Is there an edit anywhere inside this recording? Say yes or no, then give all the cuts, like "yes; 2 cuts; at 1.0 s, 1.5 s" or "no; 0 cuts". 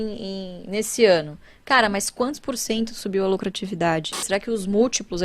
yes; 1 cut; at 4.2 s